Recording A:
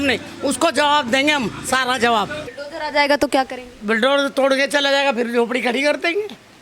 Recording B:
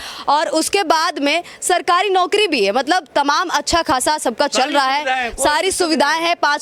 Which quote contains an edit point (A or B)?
A